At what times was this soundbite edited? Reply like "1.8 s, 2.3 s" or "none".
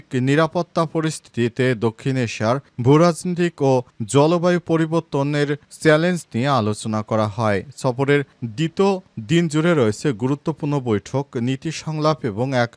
none